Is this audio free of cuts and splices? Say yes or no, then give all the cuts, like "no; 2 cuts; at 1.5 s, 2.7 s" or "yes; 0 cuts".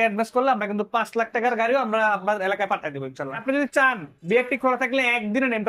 no; 1 cut; at 3.4 s